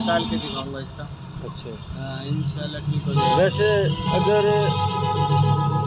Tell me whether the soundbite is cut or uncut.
uncut